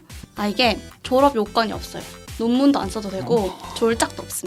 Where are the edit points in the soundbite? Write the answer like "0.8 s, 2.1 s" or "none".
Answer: none